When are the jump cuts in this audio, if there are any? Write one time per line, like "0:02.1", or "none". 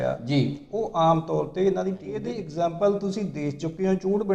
0:02.4